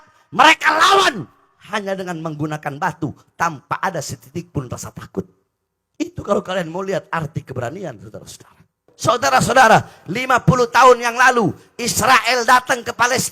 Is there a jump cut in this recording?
yes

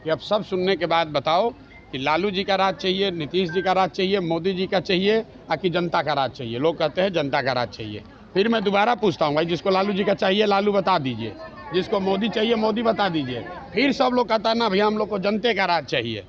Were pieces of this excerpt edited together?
no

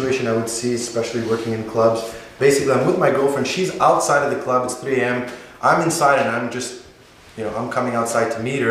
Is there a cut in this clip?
no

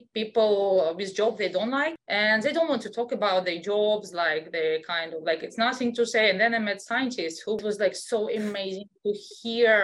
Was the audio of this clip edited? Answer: yes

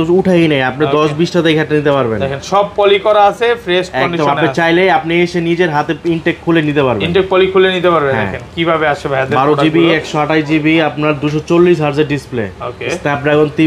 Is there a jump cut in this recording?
no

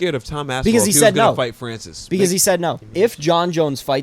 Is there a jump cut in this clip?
yes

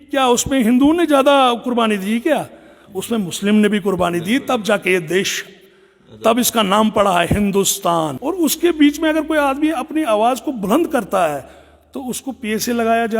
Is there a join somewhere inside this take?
yes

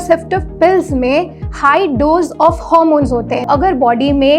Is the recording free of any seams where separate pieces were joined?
no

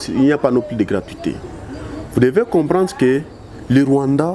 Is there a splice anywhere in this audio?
no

